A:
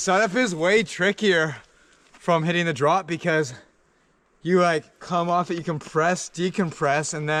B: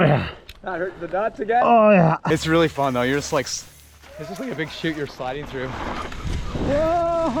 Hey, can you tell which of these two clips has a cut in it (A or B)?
B